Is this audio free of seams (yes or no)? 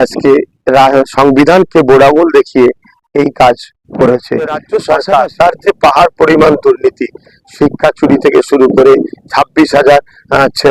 no